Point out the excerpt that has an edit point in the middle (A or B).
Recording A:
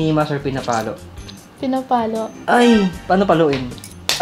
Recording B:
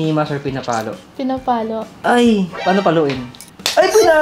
B